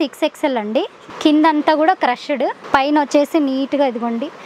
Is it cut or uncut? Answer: cut